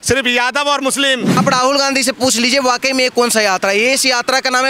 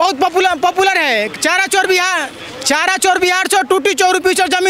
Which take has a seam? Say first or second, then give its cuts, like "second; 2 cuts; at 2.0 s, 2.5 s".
first; 1 cut; at 1.4 s